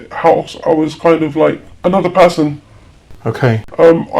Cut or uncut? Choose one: cut